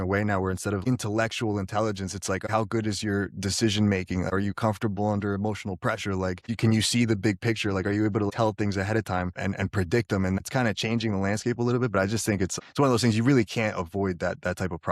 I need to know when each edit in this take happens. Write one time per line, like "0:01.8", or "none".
0:00.8
0:02.4
0:09.4
0:10.4